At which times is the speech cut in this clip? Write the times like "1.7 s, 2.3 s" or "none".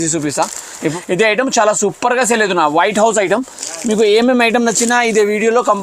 1.0 s